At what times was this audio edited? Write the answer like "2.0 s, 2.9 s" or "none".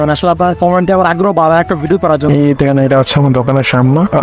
2.3 s